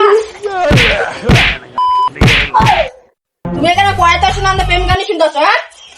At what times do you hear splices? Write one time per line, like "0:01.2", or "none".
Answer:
0:03.4